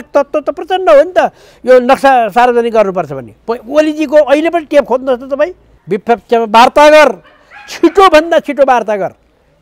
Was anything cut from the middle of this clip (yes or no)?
yes